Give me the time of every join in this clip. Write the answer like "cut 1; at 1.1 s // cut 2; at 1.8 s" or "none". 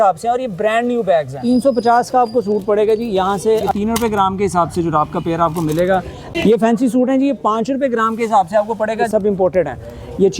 cut 1; at 1.4 s // cut 2; at 3.7 s // cut 3; at 6.2 s // cut 4; at 9.1 s